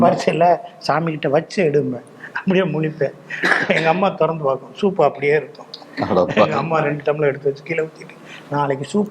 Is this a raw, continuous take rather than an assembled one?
yes; 0 cuts

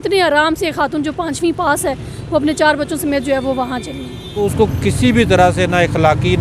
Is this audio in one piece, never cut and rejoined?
no; 1 cut; at 4.3 s

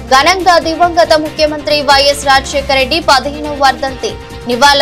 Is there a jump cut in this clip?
no; 0 cuts

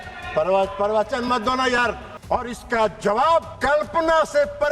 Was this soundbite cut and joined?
yes; 2 cuts; at 2.1 s, 3.5 s

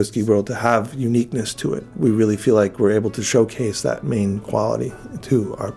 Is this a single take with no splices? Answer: no; 1 cut; at 1.9 s

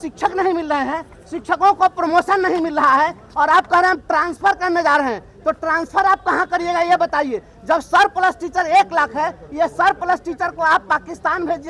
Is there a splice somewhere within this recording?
no; 0 cuts

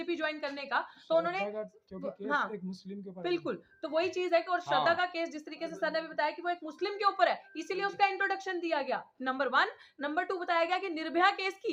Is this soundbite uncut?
yes; 0 cuts

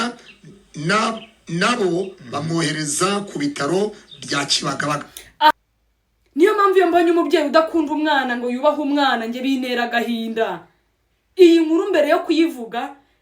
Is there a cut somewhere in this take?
yes; 1 cut; at 5.5 s

